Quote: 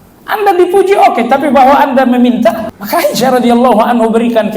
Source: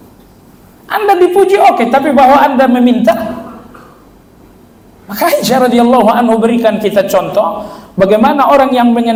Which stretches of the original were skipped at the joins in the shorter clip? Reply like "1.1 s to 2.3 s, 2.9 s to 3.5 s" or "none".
3.4 s to 5.0 s